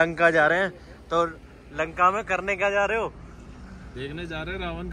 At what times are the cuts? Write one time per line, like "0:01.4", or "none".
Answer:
none